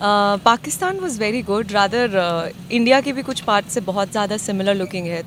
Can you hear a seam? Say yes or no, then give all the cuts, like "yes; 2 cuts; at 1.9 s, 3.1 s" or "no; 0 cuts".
no; 0 cuts